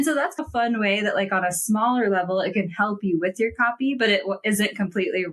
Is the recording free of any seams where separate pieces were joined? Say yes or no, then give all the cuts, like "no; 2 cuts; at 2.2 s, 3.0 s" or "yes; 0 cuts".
yes; 0 cuts